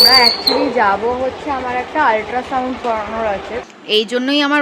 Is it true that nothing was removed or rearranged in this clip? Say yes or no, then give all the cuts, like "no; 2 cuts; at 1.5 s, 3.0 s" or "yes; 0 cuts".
no; 1 cut; at 3.6 s